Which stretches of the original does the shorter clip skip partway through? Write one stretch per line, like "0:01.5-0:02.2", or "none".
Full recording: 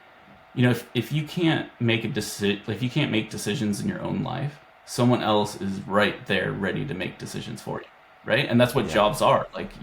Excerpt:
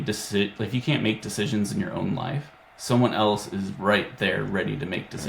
none